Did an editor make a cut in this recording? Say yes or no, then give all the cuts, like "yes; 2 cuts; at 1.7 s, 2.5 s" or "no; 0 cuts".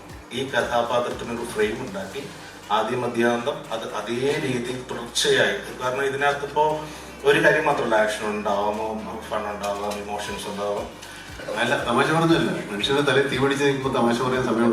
yes; 1 cut; at 11.4 s